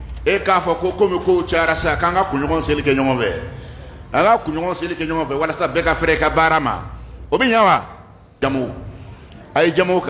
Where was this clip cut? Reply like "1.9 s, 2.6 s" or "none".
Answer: 8.3 s